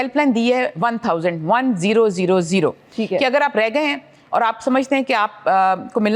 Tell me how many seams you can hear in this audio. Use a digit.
0